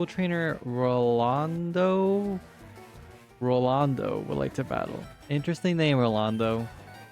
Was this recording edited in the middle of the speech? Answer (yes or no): no